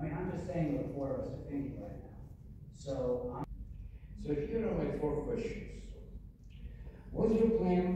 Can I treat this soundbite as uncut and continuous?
no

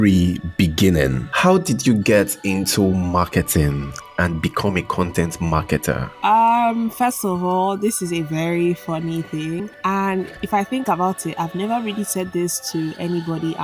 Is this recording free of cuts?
no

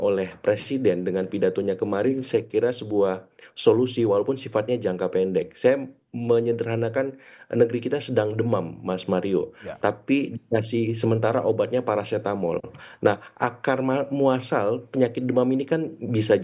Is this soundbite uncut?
yes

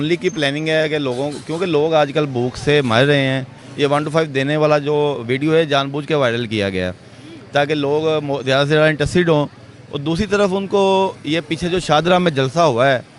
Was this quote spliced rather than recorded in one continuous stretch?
no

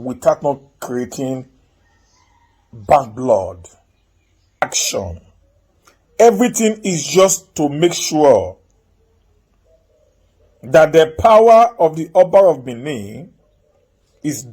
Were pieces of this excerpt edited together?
yes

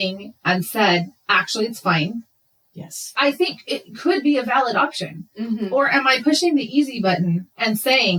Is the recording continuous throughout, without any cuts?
yes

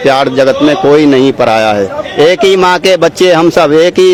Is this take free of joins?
yes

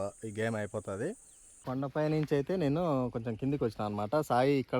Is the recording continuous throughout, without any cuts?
no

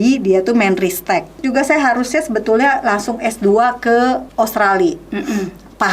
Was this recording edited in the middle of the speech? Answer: yes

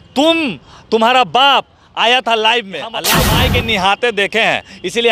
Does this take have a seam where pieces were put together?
yes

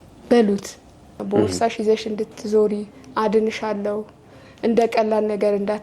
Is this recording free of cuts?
no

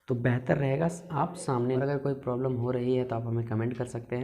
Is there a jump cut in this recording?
yes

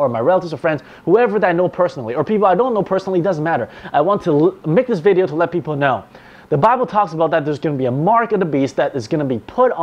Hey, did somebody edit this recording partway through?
yes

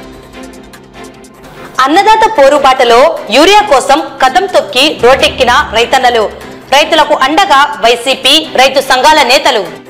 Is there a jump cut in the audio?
yes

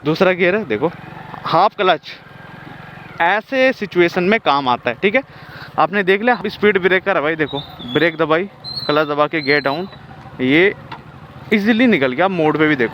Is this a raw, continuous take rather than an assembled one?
no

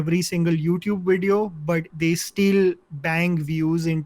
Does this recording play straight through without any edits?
no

